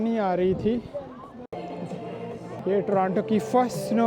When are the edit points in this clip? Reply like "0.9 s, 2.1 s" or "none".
1.5 s, 2.6 s